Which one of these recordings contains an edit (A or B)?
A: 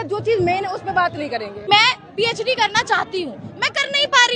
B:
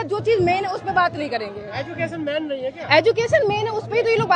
A